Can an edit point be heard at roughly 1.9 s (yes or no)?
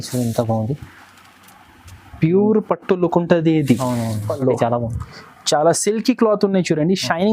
no